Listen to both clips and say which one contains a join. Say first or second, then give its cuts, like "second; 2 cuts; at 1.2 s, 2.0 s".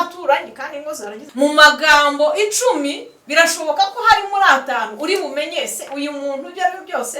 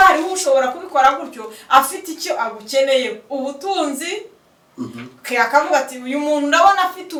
first; 1 cut; at 1.2 s